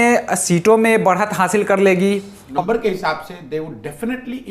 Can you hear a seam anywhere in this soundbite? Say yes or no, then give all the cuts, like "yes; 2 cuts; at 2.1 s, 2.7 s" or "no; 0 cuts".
yes; 1 cut; at 2.4 s